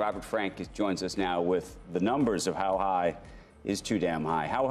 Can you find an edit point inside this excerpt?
no; 0 cuts

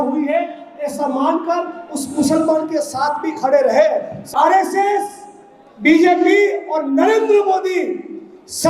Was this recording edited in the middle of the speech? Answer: yes; 1 cut; at 4.3 s

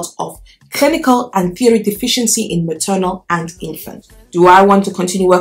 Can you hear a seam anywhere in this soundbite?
yes; 1 cut; at 3.9 s

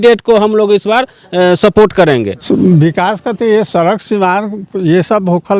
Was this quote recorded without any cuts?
no; 1 cut; at 2.4 s

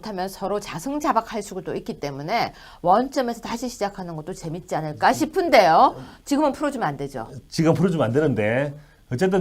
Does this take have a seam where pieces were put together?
yes; 1 cut; at 6.1 s

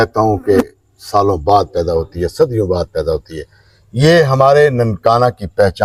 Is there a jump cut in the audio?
no; 0 cuts

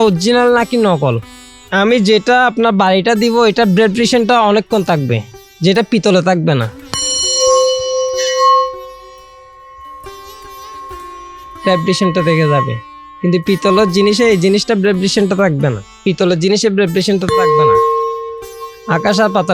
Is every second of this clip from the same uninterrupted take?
no; 1 cut; at 1.4 s

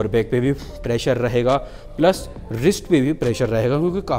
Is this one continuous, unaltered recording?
yes; 0 cuts

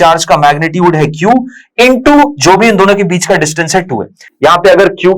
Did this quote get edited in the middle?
no; 0 cuts

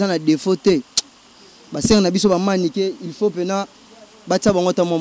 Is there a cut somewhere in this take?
no; 0 cuts

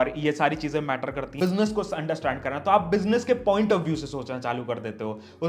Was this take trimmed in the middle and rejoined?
yes; 1 cut; at 1.3 s

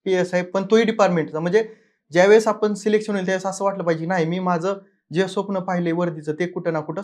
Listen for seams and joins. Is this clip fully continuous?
yes; 0 cuts

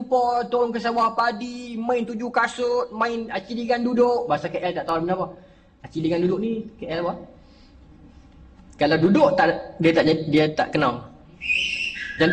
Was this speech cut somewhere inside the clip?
no; 0 cuts

